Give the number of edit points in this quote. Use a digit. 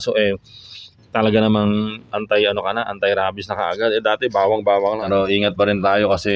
1